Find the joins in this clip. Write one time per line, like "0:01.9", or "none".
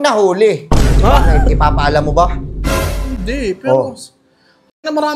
none